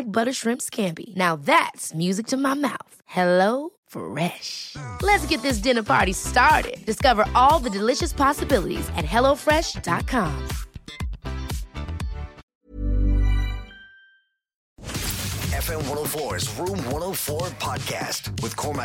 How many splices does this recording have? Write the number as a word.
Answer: two